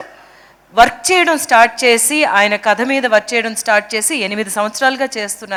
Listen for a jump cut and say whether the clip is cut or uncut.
uncut